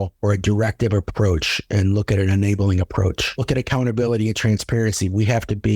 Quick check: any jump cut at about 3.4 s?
yes; 1 cut; at 3.4 s

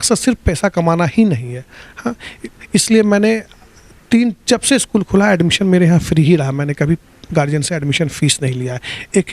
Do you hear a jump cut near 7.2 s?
no; 0 cuts

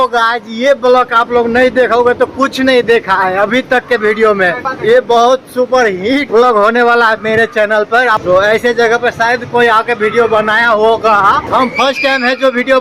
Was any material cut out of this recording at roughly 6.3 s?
yes; 4 cuts; at 4.7 s, 6.3 s, 8.2 s, 11.4 s

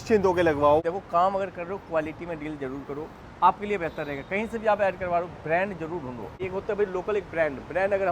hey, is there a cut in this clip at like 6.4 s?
yes; 2 cuts; at 0.8 s, 6.4 s

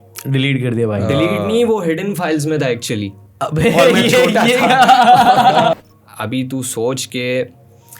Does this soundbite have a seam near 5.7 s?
yes; 1 cut; at 5.7 s

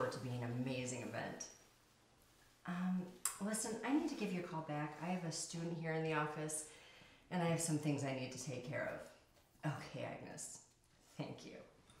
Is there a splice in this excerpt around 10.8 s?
yes; 1 cut; at 10.8 s

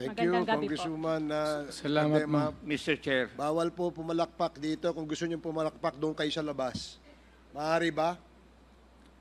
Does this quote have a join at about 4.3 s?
no; 0 cuts

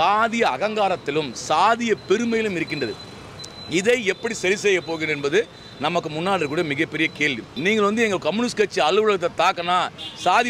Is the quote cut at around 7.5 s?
yes; 1 cut; at 7.5 s

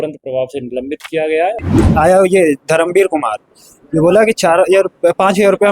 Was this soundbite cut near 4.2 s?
no; 1 cut; at 1.7 s

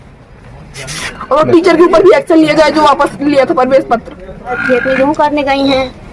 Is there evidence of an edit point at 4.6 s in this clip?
yes; 1 cut; at 4.6 s

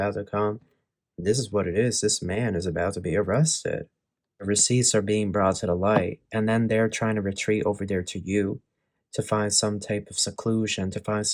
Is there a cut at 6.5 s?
no; 1 cut; at 4.4 s

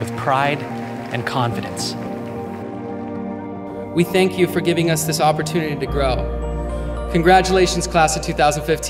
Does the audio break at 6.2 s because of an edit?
yes; 1 cut; at 6.2 s

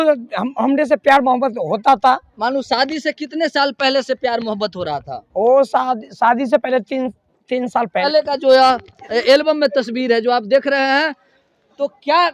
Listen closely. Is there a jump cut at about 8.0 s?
yes; 1 cut; at 8.0 s

